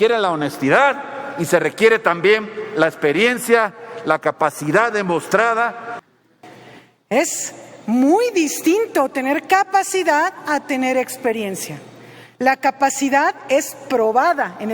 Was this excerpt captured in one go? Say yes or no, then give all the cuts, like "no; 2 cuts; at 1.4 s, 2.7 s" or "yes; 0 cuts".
no; 1 cut; at 6.1 s